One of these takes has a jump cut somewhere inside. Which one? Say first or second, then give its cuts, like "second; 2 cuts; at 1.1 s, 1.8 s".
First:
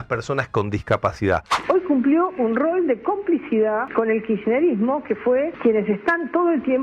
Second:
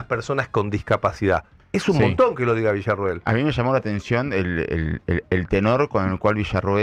first; 3 cuts; at 1.5 s, 3.9 s, 5.5 s